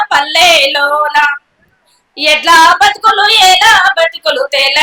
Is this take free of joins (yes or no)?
yes